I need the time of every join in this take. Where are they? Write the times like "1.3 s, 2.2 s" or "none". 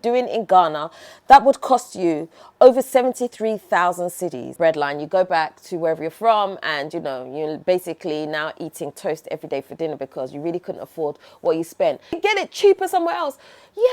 4.5 s, 12.2 s